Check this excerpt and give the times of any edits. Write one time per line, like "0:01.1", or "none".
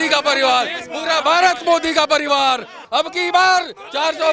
0:02.8

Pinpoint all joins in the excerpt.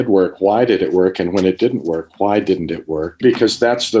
0:03.1

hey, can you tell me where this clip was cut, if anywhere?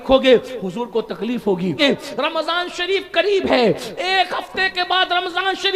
0:01.8

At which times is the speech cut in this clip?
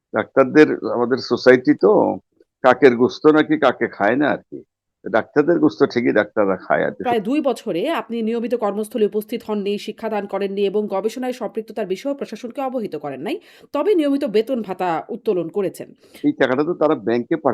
0:07.0
0:16.0

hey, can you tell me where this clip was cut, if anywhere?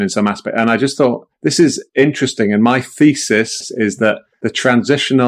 0:01.7
0:03.5
0:04.3

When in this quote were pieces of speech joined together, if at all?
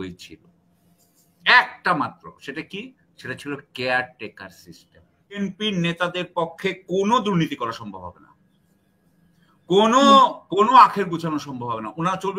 0:05.4

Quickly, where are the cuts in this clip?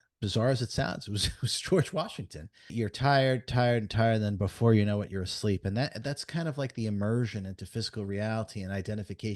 0:02.7

